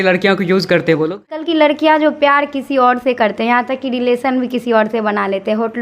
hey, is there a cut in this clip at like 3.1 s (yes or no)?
no